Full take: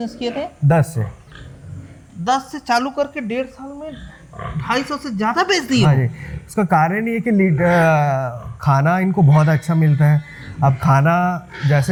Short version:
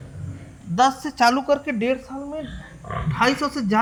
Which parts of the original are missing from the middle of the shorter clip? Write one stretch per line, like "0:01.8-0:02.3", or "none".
none